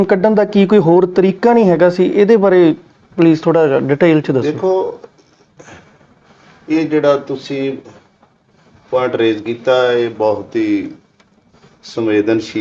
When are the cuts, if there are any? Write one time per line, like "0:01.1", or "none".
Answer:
none